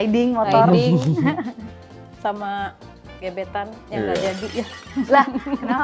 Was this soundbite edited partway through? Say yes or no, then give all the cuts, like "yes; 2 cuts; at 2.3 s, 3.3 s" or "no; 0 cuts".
no; 0 cuts